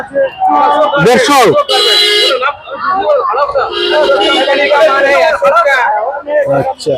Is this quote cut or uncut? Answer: uncut